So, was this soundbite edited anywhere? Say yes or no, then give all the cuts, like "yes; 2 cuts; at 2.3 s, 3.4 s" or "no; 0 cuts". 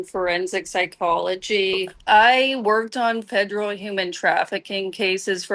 yes; 1 cut; at 2.1 s